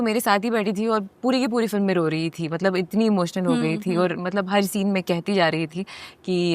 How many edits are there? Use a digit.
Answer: 0